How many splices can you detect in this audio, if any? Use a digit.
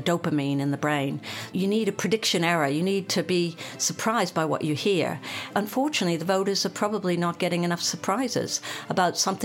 2